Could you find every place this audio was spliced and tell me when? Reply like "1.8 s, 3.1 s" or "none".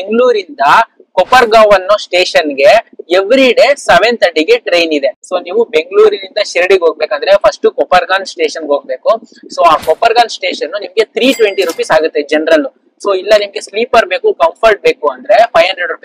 none